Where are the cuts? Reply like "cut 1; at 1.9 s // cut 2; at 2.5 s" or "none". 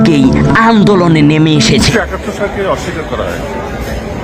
cut 1; at 1.9 s